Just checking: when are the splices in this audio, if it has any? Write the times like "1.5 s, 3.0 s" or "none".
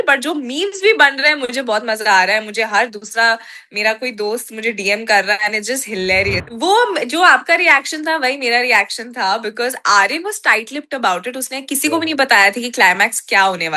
6.4 s

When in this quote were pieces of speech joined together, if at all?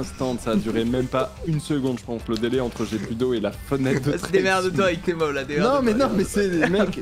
none

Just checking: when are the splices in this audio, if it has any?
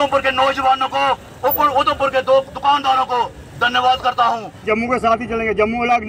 4.6 s

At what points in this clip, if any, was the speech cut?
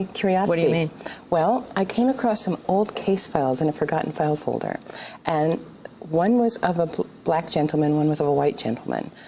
none

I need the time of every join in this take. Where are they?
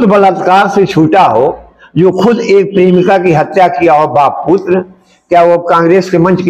none

